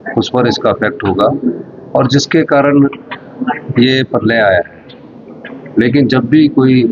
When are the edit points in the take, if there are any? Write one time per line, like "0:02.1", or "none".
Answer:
none